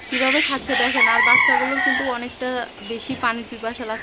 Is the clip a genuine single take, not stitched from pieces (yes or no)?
yes